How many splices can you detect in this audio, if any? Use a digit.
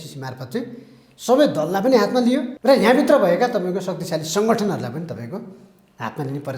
1